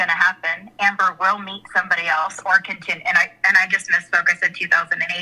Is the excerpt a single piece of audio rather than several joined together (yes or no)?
yes